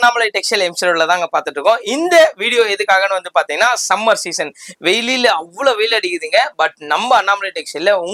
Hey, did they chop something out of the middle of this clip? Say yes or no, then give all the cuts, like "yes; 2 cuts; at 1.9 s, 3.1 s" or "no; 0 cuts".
no; 0 cuts